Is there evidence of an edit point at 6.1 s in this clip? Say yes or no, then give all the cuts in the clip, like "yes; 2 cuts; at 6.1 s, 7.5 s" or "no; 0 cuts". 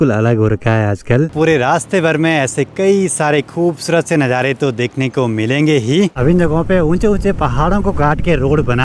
yes; 2 cuts; at 1.3 s, 6.1 s